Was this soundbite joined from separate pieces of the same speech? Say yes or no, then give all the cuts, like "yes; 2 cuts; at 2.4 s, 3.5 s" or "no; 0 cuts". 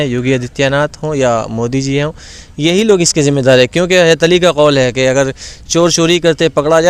no; 0 cuts